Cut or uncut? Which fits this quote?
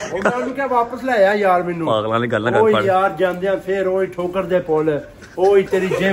uncut